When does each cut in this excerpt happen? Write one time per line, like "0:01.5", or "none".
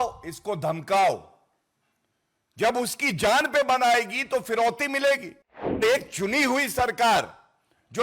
0:05.8